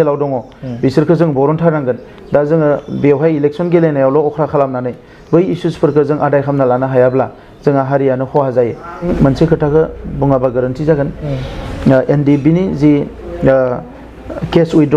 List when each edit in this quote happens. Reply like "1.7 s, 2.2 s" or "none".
9.1 s